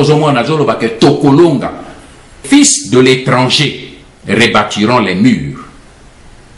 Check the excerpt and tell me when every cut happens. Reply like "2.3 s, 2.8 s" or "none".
2.4 s

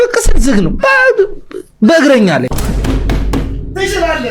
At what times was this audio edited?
0.9 s

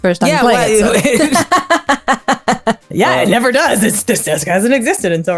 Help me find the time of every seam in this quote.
2.8 s

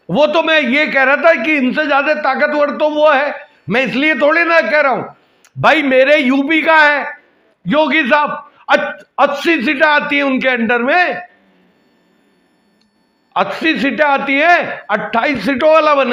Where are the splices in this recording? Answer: none

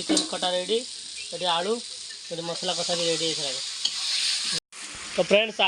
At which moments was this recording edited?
4.6 s

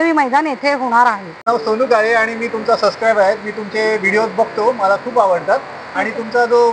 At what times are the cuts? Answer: 1.4 s

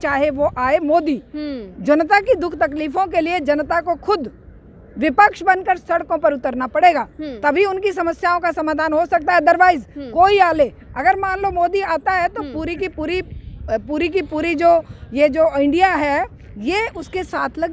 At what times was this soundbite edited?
none

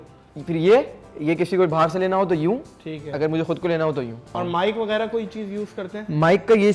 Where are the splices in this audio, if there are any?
4.3 s

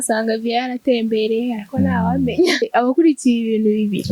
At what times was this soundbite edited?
2.7 s

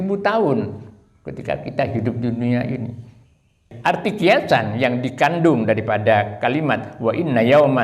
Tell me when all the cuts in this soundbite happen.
3.7 s

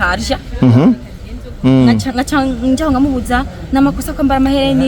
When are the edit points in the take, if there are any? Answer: none

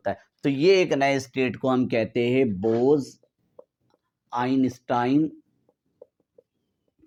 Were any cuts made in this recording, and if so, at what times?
none

